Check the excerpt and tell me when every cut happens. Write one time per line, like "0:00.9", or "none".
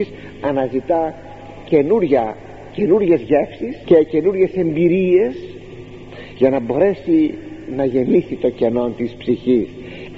0:03.7